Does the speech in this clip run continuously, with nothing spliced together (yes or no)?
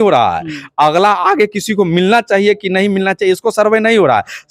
yes